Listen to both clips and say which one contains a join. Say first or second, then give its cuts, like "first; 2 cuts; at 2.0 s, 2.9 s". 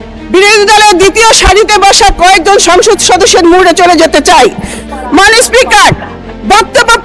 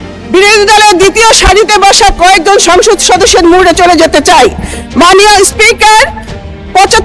first; 1 cut; at 4.8 s